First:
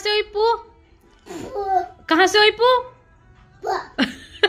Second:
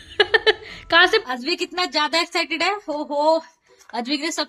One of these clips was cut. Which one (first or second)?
second